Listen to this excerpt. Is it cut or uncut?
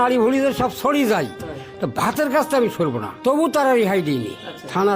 cut